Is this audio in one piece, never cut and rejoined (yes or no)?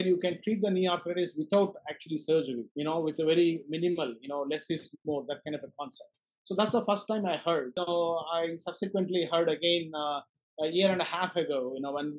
no